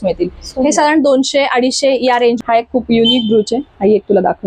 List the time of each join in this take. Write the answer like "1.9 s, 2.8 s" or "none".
2.4 s